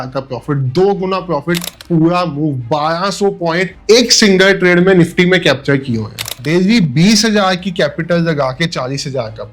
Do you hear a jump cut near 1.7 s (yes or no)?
yes